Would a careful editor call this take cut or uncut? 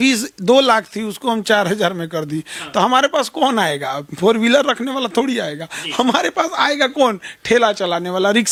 uncut